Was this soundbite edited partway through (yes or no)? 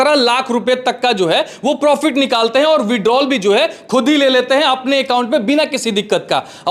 no